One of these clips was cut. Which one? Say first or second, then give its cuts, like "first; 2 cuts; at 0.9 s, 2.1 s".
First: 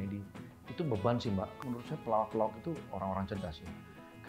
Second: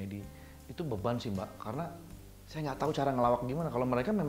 first; 1 cut; at 1.6 s